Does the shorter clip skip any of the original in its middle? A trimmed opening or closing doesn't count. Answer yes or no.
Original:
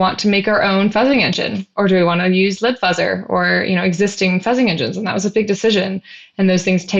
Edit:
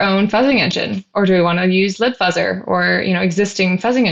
no